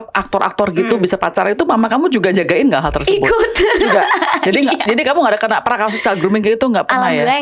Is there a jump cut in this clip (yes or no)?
no